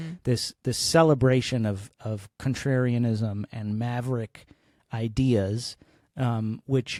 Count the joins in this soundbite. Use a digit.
0